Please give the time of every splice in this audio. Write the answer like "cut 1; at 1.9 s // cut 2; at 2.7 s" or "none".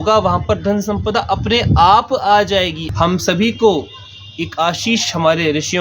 cut 1; at 2.8 s